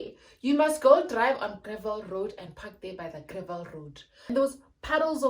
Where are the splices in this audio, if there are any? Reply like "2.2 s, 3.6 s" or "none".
4.3 s

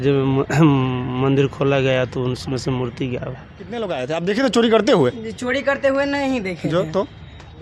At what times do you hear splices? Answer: 3.9 s

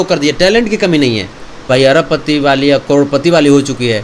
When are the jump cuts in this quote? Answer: 1.7 s

